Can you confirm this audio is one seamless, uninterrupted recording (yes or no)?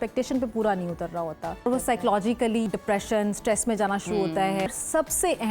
no